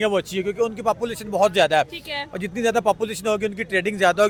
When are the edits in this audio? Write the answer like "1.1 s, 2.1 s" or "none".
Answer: none